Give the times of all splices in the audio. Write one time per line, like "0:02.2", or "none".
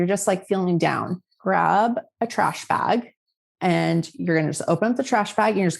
0:01.3

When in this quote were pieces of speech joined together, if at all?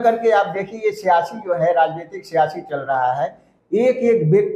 0:03.4

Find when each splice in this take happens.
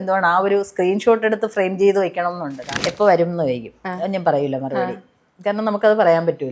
0:02.6

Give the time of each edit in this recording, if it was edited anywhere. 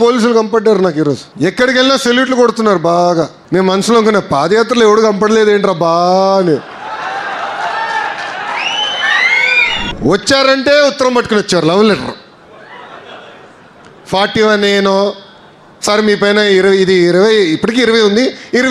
0:01.3
0:03.4
0:09.9

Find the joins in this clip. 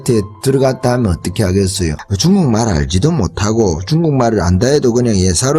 none

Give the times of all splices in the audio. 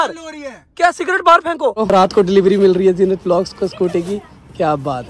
0:01.8

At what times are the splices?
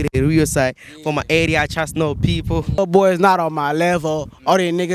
0:02.8

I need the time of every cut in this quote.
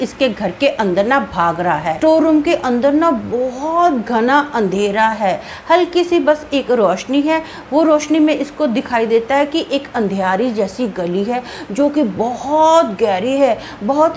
0:01.9

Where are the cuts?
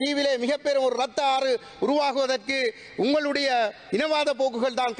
none

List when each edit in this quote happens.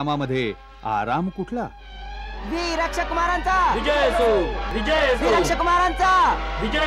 0:04.7

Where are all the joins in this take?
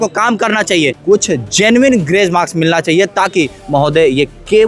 0:01.0

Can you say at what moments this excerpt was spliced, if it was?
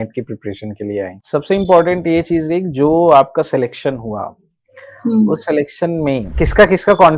0:01.2
0:06.3

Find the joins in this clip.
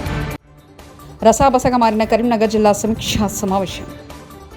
none

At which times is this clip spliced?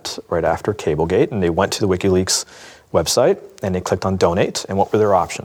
none

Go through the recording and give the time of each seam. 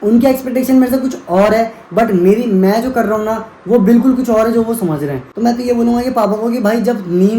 0:05.2

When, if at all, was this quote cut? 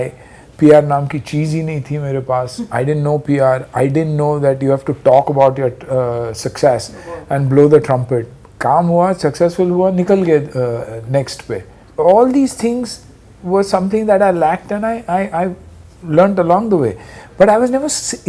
none

